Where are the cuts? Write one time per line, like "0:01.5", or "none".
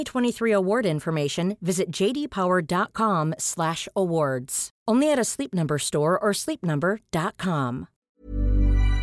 0:07.9